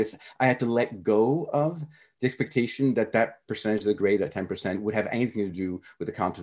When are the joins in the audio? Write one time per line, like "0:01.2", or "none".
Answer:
none